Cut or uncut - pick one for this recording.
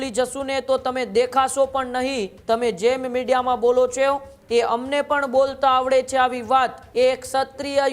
cut